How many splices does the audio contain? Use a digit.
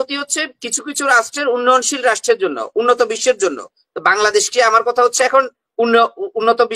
0